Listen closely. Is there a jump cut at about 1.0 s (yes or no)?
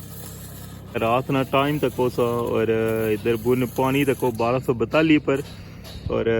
yes